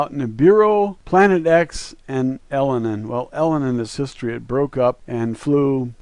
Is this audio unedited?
no; 1 cut; at 5.0 s

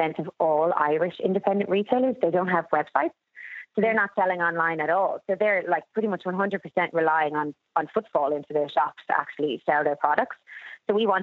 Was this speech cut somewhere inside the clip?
no; 0 cuts

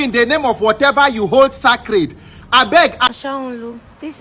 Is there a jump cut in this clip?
yes; 1 cut; at 3.1 s

